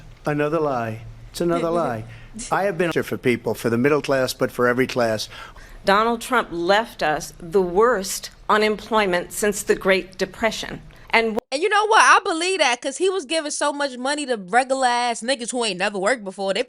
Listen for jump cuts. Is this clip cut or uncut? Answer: cut